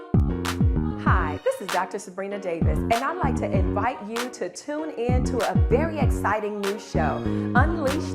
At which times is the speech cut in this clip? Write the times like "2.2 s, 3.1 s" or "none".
1.0 s